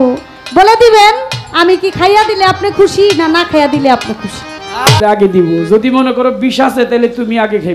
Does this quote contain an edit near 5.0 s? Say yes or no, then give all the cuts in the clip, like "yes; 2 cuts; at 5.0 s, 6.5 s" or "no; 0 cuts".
yes; 1 cut; at 5.0 s